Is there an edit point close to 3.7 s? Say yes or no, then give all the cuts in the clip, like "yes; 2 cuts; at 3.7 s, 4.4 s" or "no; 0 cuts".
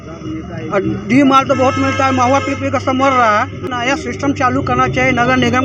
yes; 1 cut; at 3.7 s